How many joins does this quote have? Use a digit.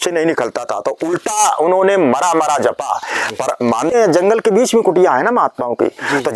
1